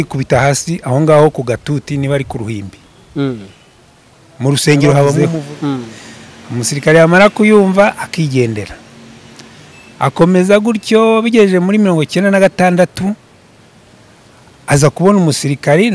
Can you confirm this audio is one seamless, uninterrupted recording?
no; 1 cut; at 5.2 s

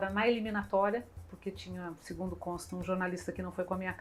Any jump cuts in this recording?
no; 0 cuts

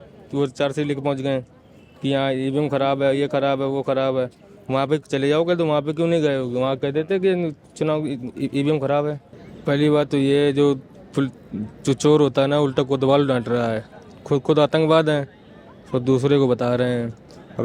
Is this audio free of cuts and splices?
no; 1 cut; at 9.3 s

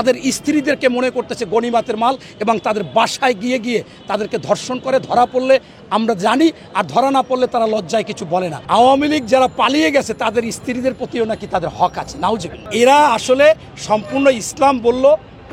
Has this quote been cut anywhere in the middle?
no; 0 cuts

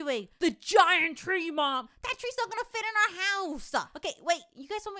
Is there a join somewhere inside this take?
yes; 1 cut; at 3.9 s

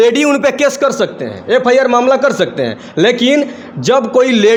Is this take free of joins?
yes; 0 cuts

